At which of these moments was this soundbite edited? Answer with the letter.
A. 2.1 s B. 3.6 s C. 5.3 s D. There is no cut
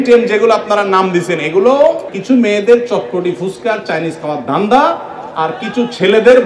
A